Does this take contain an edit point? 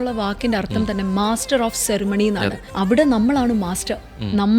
yes; 1 cut; at 2.6 s

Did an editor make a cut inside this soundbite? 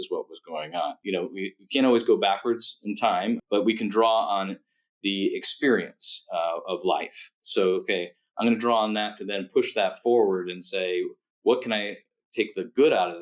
yes; 2 cuts; at 1.0 s, 3.4 s

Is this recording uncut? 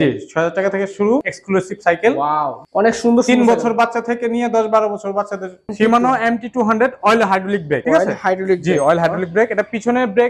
no; 2 cuts; at 1.3 s, 5.7 s

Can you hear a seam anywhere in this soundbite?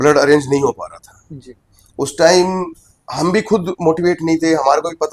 no; 0 cuts

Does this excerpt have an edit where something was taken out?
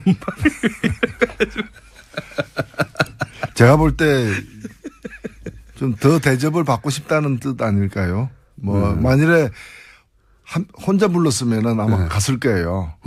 no; 0 cuts

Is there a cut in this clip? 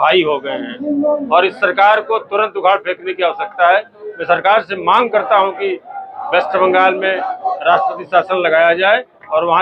no; 0 cuts

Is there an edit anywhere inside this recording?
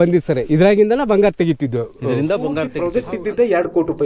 yes; 1 cut; at 2.8 s

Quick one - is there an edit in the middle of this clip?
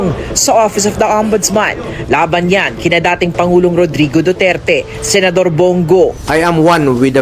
yes; 1 cut; at 6.2 s

